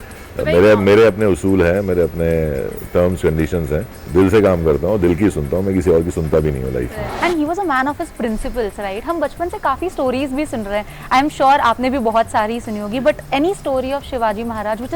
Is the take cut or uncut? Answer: cut